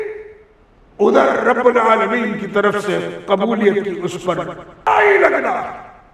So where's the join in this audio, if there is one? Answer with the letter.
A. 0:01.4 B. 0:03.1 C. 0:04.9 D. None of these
C